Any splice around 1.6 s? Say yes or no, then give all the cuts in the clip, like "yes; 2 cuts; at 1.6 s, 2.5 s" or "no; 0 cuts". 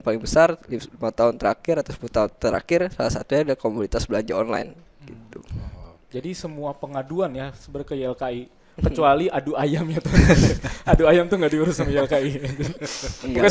no; 0 cuts